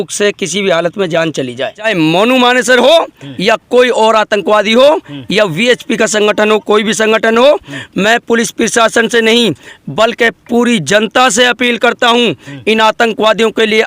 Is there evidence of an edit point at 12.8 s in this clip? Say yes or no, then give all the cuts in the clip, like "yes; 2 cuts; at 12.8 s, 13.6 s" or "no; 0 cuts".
no; 1 cut; at 1.9 s